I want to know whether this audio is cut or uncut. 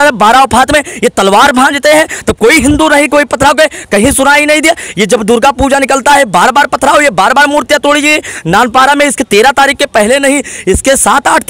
uncut